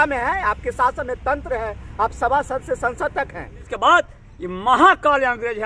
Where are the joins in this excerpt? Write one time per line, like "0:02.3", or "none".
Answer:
0:03.7